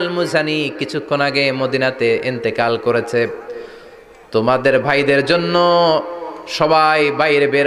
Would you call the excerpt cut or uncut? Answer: uncut